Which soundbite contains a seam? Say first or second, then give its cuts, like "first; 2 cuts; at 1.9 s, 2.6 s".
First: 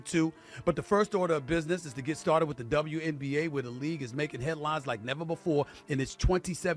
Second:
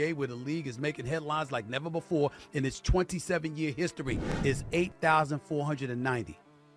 second; 1 cut; at 4.4 s